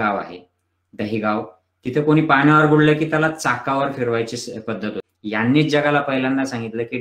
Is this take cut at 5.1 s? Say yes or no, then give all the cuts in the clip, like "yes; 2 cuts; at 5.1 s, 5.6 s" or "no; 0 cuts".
yes; 1 cut; at 5.1 s